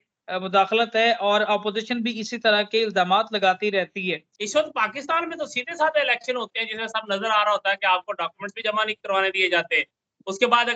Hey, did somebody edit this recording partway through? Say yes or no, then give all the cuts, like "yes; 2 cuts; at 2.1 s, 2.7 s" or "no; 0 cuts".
yes; 1 cut; at 4.3 s